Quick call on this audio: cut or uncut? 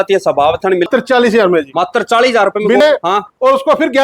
cut